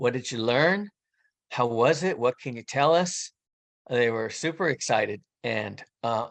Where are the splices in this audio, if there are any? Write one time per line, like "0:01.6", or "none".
0:05.3